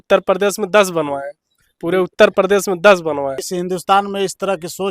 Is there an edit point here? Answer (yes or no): yes